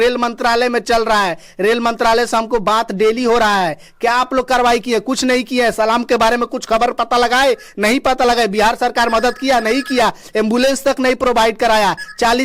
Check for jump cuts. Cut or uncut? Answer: uncut